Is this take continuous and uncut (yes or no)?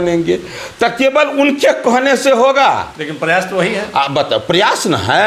yes